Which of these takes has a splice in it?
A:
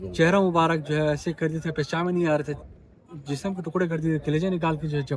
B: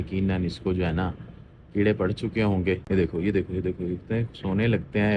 B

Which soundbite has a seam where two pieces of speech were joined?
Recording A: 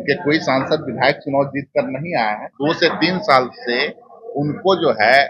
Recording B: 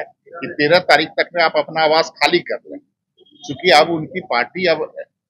A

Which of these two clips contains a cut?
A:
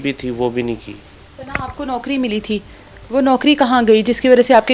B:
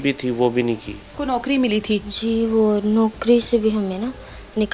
B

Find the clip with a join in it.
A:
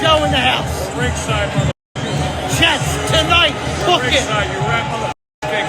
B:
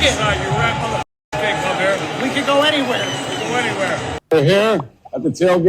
B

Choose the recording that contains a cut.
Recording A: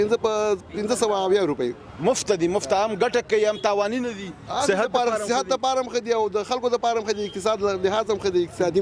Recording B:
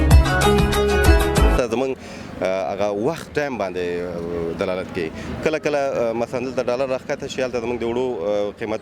B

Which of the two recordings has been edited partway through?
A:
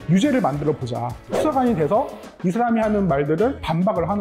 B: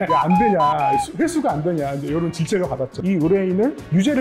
B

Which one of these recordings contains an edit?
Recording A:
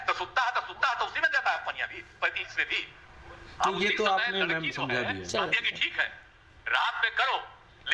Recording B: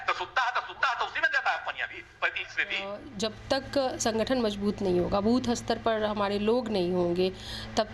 B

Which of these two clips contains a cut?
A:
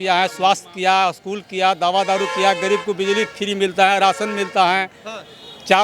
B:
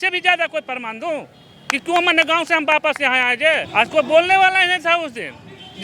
B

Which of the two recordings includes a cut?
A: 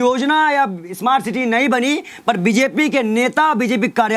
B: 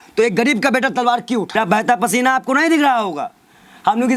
B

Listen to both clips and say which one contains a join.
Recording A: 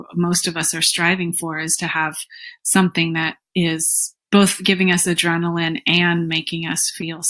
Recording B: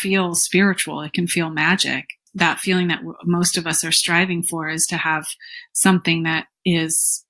B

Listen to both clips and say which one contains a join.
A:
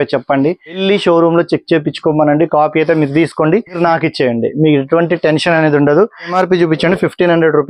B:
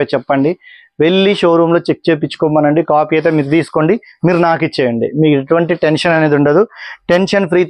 A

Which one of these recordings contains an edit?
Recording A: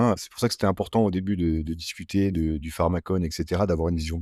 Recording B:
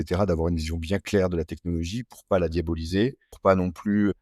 B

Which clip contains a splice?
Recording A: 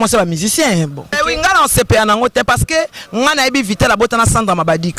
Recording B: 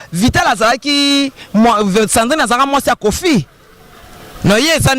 A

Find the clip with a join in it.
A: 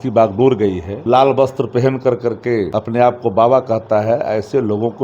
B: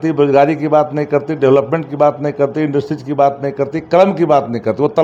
A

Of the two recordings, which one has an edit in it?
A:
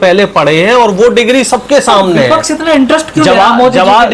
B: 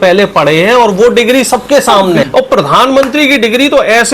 B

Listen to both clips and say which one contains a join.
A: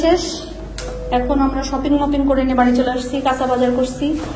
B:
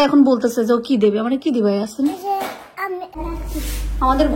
B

